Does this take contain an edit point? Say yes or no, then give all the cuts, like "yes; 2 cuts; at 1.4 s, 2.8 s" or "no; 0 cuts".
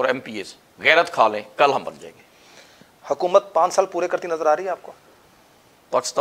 no; 0 cuts